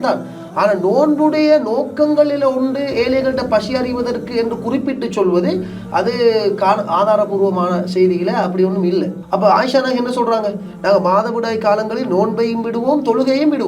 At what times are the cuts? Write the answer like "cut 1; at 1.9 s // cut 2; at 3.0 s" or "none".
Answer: cut 1; at 9.2 s